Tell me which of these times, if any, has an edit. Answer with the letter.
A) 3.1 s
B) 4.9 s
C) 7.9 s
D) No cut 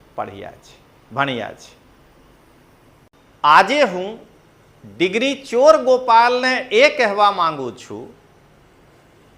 A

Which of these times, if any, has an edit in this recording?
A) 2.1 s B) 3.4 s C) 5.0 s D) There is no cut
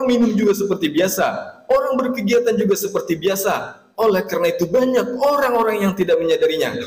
D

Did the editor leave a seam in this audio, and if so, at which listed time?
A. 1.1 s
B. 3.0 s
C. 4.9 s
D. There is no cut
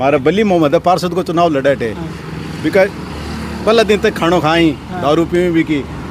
D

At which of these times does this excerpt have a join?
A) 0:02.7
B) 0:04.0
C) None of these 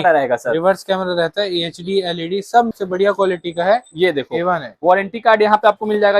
A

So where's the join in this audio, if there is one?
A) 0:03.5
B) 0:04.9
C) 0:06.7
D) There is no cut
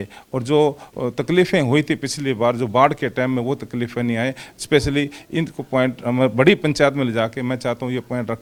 D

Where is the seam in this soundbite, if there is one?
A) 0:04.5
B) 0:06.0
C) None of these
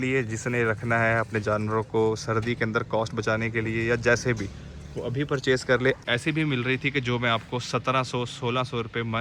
B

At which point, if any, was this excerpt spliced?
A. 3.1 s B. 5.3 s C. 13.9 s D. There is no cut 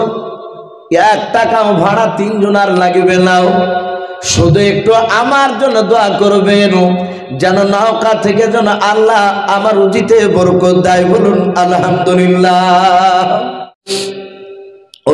C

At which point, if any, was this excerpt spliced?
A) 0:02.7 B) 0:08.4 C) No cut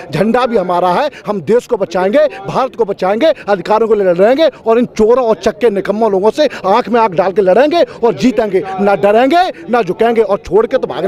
C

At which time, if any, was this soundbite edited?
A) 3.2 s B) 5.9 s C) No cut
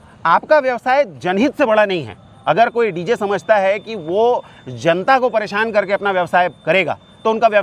C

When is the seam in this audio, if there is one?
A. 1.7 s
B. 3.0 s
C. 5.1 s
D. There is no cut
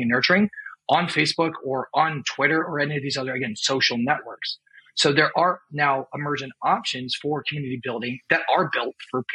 D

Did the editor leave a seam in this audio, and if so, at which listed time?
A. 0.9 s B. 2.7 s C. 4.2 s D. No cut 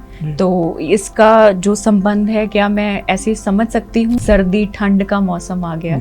C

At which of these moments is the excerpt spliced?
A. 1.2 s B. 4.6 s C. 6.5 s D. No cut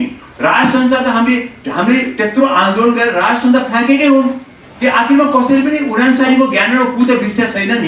D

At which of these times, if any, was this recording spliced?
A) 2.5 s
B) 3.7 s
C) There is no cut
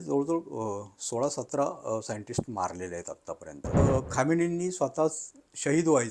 B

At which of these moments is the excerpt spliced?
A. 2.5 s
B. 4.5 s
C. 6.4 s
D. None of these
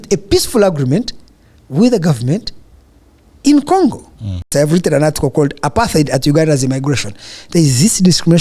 B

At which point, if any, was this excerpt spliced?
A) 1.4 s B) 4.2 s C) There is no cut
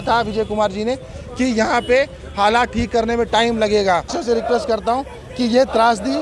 B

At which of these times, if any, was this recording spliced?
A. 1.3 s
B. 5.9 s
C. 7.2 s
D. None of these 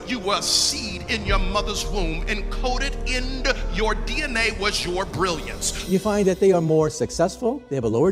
B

